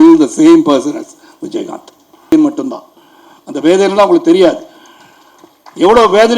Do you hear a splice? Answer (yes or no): yes